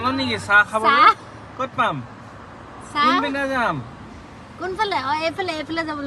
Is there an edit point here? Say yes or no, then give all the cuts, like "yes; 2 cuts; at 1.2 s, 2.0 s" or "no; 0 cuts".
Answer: no; 0 cuts